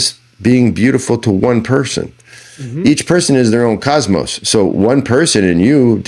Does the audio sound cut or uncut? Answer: uncut